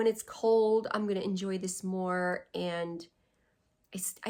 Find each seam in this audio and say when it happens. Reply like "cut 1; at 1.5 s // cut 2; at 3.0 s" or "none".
none